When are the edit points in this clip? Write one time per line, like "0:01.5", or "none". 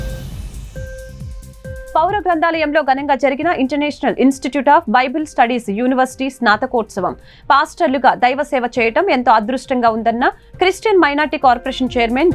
0:01.2